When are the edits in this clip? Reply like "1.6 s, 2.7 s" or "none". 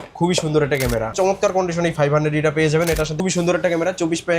1.1 s, 3.2 s